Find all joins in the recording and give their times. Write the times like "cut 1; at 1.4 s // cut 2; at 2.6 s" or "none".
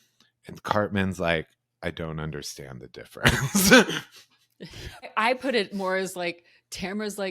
cut 1; at 5.1 s